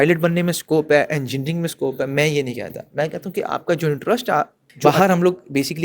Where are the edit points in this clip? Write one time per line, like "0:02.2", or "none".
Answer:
0:04.6